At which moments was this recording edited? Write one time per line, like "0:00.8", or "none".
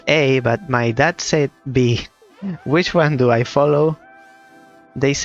none